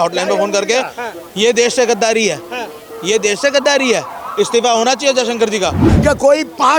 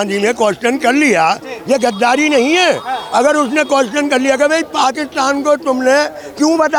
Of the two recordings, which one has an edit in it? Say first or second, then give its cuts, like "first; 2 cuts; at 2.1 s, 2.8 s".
first; 1 cut; at 5.8 s